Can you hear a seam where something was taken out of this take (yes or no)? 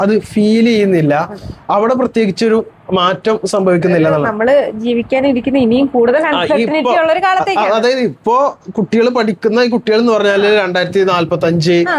no